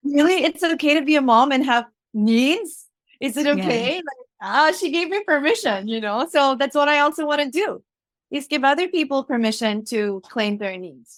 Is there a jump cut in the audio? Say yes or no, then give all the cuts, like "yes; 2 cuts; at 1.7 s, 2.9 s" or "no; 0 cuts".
no; 0 cuts